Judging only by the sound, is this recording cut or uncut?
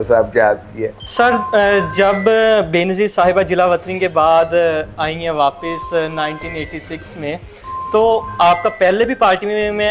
uncut